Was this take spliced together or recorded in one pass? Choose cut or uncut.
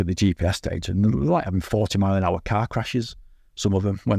uncut